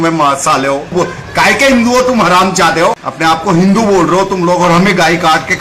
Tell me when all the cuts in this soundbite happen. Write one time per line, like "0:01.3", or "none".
0:00.9
0:03.1